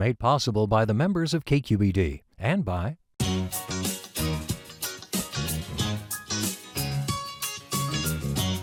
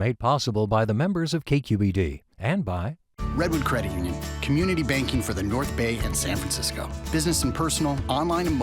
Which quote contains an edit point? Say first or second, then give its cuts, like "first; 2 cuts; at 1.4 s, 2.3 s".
second; 1 cut; at 3.0 s